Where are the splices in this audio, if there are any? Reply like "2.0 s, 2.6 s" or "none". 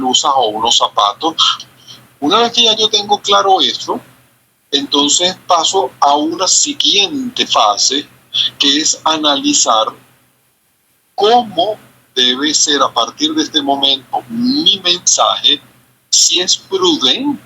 1.5 s